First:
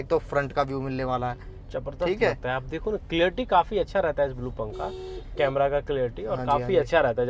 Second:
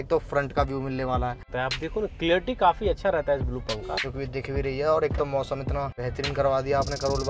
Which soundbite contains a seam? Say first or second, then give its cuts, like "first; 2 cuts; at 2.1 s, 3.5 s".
second; 3 cuts; at 1.5 s, 4.5 s, 6.0 s